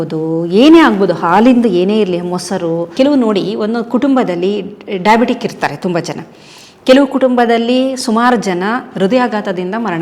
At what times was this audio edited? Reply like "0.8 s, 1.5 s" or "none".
2.9 s